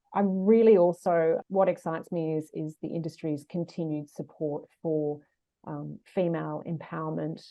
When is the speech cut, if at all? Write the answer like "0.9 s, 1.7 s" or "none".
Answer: 1.4 s